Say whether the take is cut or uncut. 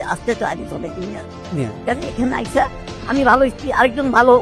uncut